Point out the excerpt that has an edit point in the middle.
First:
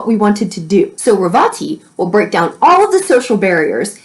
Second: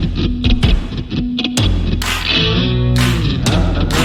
first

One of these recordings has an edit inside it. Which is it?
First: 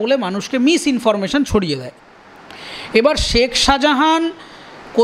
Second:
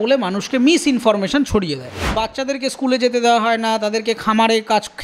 second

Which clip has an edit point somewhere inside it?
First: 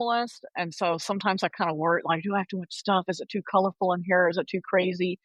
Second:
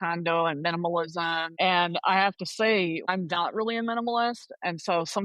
second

